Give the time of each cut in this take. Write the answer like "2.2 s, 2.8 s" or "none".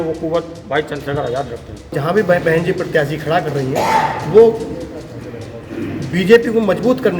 1.9 s